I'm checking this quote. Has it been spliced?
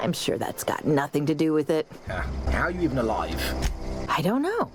no; 0 cuts

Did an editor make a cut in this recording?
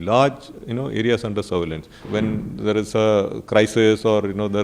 yes; 1 cut; at 2.1 s

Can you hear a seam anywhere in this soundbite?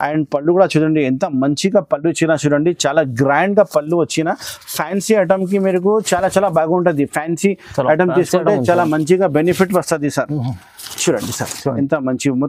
no; 0 cuts

